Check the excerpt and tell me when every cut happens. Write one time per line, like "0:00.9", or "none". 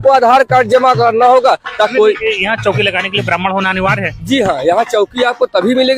0:01.9